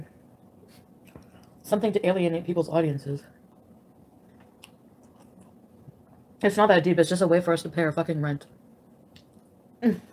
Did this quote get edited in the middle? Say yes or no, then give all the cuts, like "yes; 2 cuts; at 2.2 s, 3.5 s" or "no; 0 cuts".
no; 0 cuts